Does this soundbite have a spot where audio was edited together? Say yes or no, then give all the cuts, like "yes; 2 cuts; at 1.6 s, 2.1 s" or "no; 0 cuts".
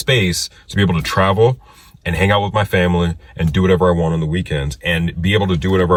no; 0 cuts